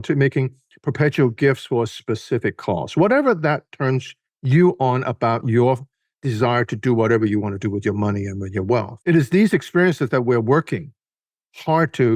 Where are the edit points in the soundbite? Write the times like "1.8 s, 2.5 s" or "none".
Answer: 8.9 s